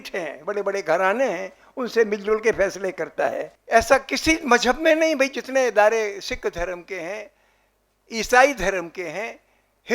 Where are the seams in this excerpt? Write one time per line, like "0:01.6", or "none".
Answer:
0:03.5